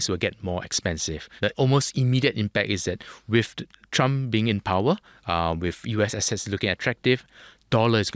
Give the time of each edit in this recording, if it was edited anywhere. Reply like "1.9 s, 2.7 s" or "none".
1.4 s